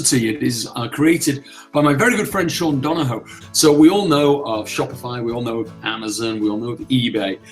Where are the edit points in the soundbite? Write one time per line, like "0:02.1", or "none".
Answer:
0:03.3